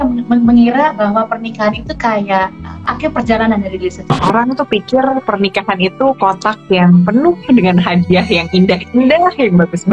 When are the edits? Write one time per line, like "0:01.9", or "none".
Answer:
0:02.9
0:04.2